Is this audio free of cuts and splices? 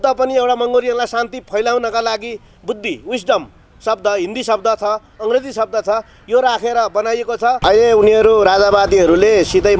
no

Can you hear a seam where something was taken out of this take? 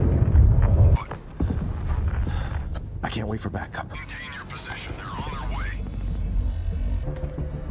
yes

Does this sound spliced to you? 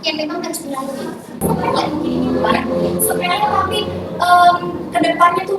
yes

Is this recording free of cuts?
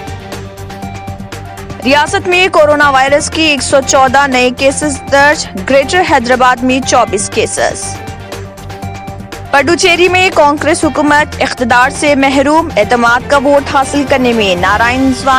yes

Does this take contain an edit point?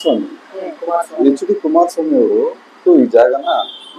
yes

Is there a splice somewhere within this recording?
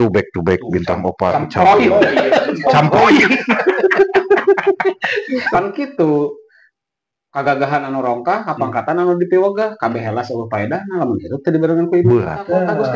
yes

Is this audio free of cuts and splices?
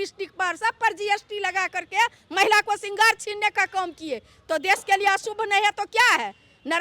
yes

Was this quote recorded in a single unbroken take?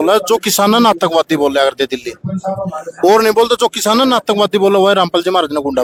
yes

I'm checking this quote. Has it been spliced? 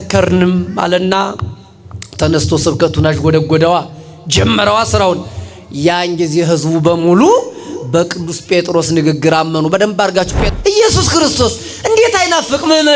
yes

